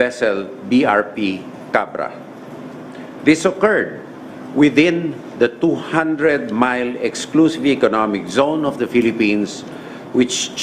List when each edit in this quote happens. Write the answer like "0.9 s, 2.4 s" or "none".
none